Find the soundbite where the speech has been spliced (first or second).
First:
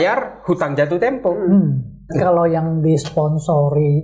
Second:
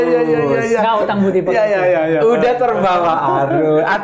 first